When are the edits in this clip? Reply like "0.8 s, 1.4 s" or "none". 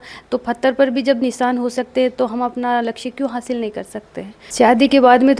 4.4 s